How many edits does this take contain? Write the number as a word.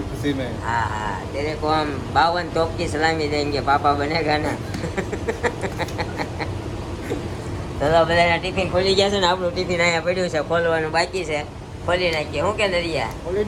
zero